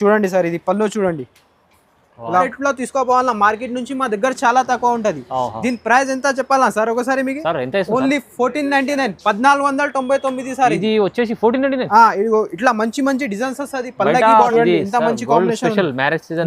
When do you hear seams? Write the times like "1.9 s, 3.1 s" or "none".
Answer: 2.5 s, 14.5 s